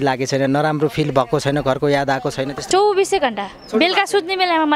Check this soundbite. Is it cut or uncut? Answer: cut